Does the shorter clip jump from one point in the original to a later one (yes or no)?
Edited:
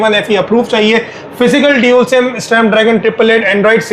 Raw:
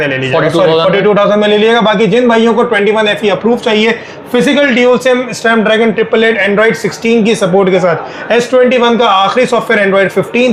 no